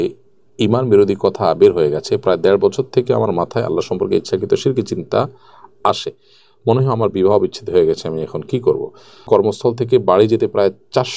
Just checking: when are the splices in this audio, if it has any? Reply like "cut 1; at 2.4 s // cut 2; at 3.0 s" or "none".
cut 1; at 9.2 s